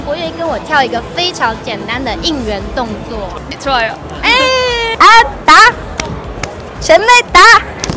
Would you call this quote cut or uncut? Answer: cut